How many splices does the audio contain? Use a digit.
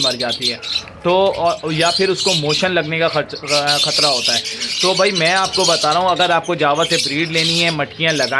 0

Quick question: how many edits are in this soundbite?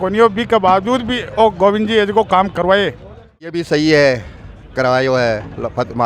1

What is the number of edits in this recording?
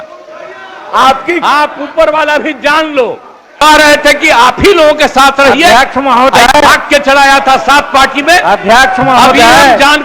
1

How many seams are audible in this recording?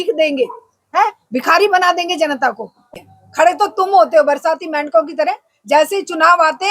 1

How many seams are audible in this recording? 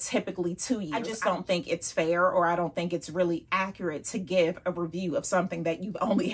1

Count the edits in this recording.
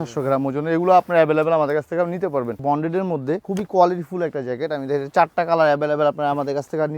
2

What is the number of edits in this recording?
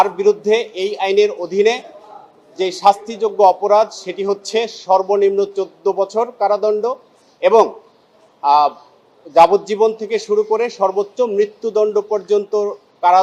0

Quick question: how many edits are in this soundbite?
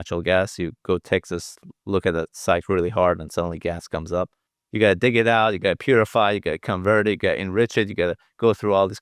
0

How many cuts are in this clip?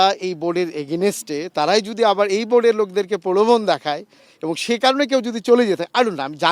0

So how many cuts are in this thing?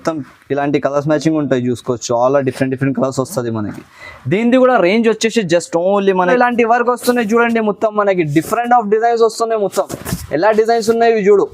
1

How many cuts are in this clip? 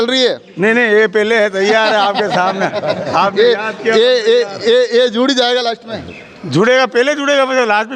0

